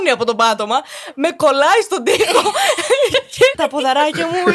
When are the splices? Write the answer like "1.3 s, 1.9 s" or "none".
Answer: 3.6 s